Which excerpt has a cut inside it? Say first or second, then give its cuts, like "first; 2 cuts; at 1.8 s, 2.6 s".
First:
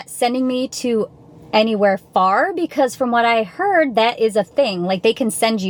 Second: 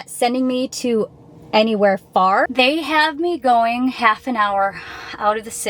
second; 1 cut; at 2.5 s